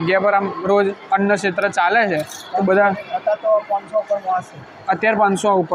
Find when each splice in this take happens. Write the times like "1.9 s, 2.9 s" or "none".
none